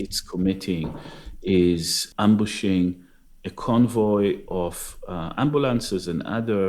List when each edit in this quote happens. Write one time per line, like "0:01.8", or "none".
0:02.0